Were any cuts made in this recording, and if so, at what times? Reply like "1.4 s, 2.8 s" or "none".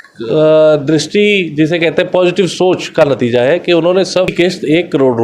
4.3 s